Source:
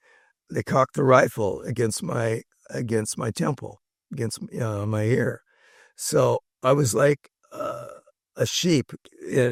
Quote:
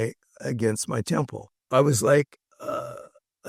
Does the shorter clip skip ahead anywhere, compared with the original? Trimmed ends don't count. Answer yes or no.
yes